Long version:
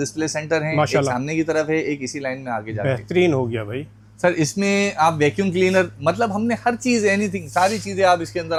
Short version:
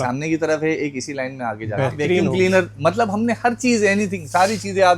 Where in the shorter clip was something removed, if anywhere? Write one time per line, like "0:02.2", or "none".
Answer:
0:02.3